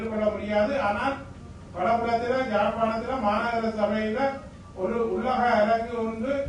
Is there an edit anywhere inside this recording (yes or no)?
no